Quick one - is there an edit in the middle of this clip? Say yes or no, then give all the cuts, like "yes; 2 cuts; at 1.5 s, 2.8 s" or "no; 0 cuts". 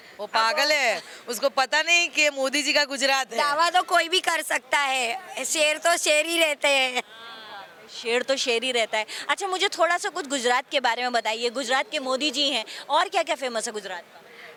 no; 0 cuts